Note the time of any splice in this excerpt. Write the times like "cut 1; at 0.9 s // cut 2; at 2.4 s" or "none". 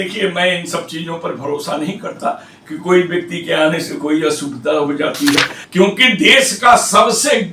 cut 1; at 5.6 s